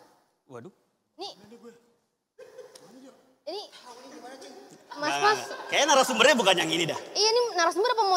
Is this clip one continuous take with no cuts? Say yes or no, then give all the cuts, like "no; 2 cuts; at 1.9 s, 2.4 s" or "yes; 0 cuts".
yes; 0 cuts